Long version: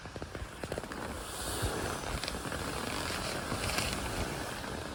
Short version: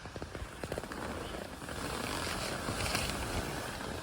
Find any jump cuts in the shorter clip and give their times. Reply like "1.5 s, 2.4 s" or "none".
1.4 s